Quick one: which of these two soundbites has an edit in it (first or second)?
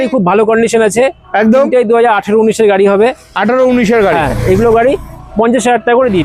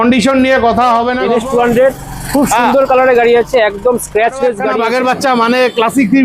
second